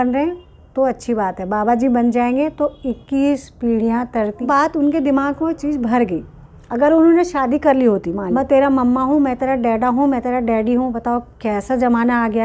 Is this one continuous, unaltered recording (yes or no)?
no